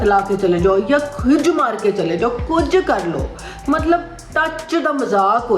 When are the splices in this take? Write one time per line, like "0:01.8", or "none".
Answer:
none